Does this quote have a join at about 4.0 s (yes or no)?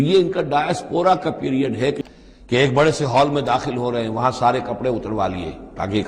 no